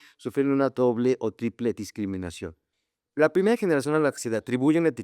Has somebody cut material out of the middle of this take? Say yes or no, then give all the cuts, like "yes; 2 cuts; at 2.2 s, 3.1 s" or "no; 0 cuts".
yes; 1 cut; at 2.7 s